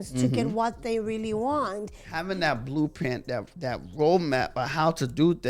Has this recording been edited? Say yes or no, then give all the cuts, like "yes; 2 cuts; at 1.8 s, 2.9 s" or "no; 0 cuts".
yes; 1 cut; at 2.1 s